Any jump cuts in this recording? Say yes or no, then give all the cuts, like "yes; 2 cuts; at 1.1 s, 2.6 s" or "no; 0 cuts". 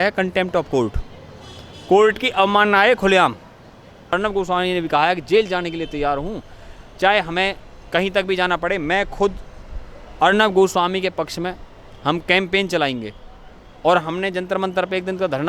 yes; 1 cut; at 4.1 s